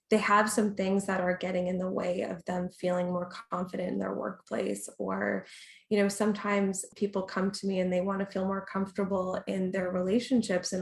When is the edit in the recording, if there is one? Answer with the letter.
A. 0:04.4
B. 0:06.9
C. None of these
B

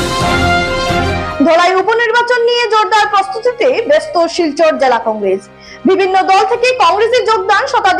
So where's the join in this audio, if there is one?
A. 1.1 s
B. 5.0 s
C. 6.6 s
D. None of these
A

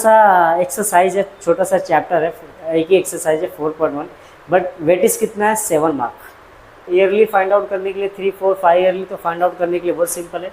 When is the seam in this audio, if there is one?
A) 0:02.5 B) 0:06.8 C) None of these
B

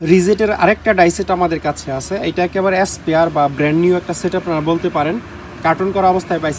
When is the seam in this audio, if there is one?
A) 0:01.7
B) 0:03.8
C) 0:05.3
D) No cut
D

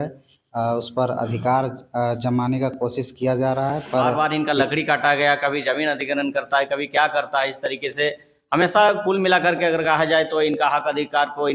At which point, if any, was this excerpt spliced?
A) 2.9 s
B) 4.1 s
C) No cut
B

